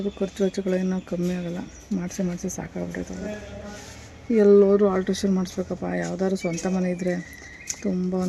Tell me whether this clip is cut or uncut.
uncut